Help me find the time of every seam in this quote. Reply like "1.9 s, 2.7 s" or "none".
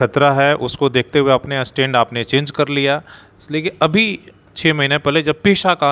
none